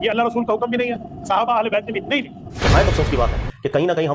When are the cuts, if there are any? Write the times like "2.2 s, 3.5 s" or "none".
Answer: 2.4 s